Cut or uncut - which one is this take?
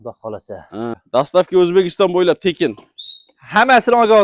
cut